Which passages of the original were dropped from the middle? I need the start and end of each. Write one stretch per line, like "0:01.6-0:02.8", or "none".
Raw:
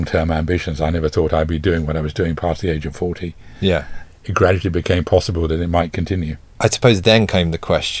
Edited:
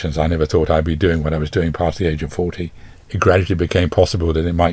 0:03.5-0:04.0

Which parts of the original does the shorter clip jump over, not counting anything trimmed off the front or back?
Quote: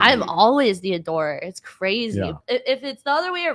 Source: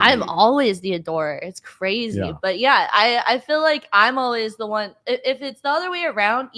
0:02.4-0:04.9

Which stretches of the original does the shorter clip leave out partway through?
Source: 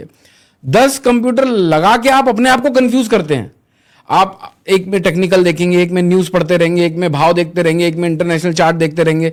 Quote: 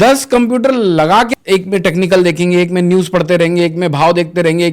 0:02.0-0:04.5

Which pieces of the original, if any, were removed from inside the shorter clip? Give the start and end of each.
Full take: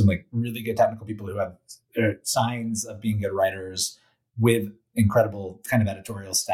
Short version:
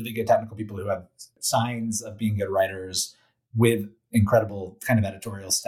0:01.9-0:02.2

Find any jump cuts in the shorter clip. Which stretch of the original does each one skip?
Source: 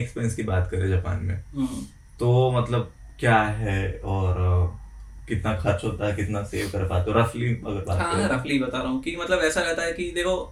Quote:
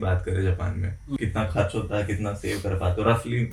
0:01.6-0:05.3

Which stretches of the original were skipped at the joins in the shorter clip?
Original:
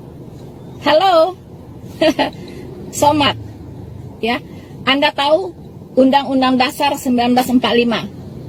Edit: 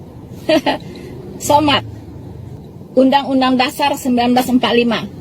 0:04.1-0:05.6

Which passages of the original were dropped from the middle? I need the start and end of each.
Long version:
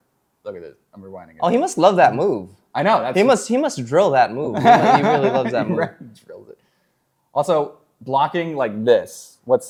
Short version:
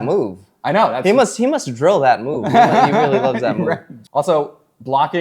0:06.1-0:07.2

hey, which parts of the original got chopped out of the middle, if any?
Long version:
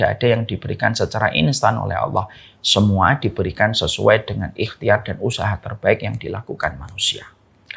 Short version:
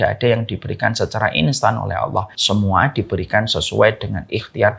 0:02.4-0:02.6

